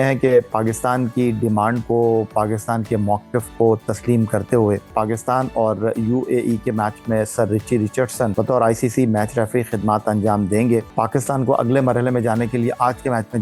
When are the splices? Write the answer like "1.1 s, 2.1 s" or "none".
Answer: 4.9 s, 8.3 s, 10.9 s